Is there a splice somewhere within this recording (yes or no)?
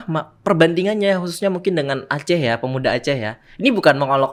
no